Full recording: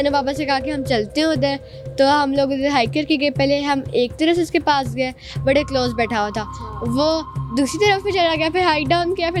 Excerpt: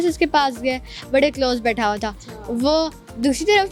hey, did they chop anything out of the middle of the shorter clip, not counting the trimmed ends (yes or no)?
no